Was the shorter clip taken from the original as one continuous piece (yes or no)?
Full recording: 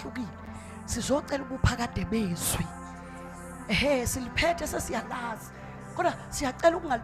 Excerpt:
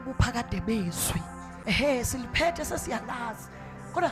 no